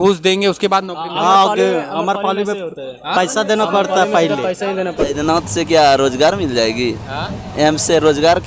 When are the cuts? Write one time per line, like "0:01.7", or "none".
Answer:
0:05.0